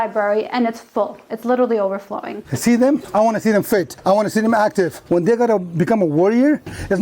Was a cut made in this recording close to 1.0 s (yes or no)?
no